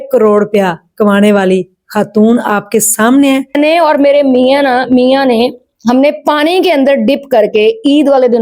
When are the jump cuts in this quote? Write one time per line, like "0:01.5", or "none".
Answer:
0:03.5